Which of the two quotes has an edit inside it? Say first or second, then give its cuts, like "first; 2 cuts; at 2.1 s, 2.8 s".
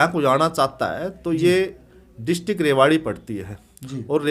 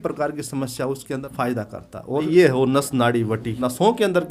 second; 3 cuts; at 1.0 s, 2.2 s, 3.5 s